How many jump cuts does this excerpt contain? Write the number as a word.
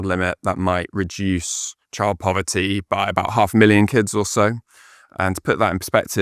zero